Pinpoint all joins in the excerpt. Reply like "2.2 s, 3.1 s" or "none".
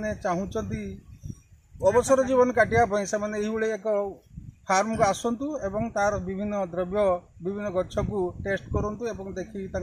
none